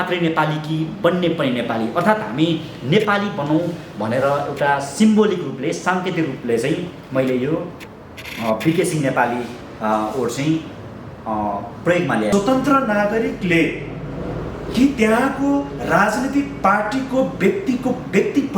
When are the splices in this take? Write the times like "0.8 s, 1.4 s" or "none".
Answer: 12.3 s